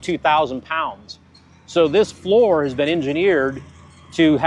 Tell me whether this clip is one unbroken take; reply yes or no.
yes